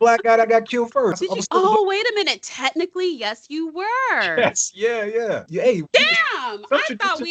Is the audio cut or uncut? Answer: cut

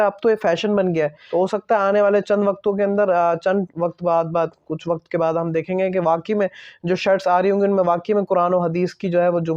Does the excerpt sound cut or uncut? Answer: cut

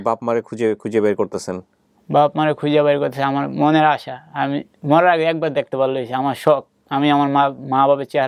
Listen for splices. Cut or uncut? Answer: uncut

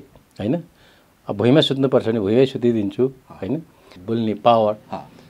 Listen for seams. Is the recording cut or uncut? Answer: cut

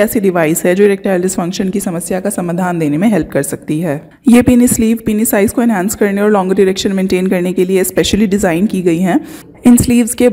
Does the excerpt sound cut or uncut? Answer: cut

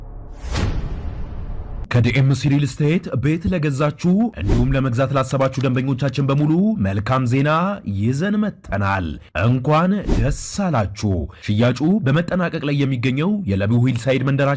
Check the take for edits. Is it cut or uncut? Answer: uncut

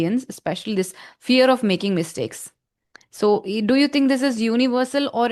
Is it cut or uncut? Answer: uncut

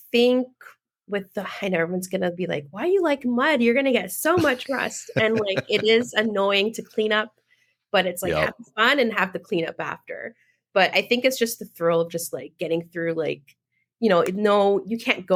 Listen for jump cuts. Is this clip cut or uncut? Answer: uncut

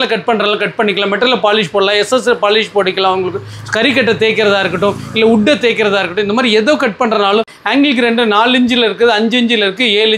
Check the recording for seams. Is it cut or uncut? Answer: cut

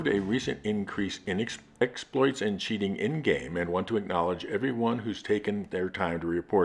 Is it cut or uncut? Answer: uncut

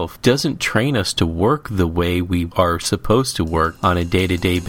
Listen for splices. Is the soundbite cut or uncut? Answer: cut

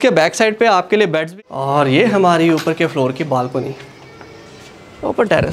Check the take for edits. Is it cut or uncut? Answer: cut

